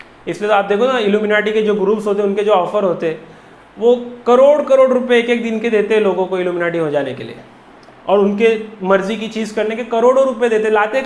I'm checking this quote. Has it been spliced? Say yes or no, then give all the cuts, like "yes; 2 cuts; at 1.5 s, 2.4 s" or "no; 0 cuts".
no; 0 cuts